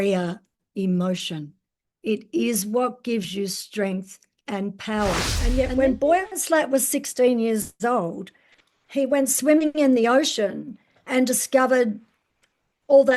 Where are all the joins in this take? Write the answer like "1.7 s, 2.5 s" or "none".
5.3 s

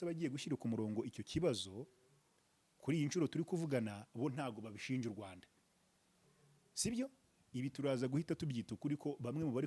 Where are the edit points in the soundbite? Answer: none

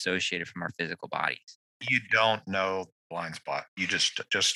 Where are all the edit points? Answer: 2.0 s

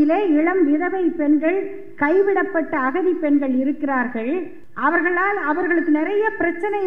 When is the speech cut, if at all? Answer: 4.6 s

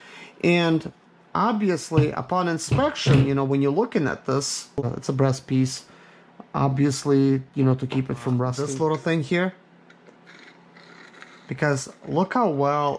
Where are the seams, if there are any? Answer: 4.5 s, 8.5 s

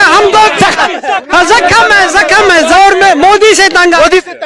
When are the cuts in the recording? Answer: 2.7 s

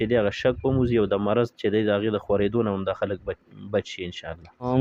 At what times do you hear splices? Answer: none

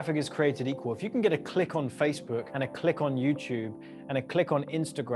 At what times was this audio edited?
2.5 s

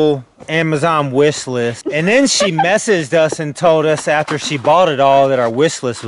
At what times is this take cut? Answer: none

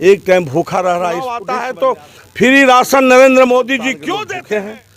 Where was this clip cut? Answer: 1.4 s, 4.0 s

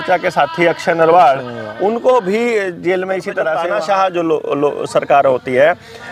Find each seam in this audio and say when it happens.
3.6 s

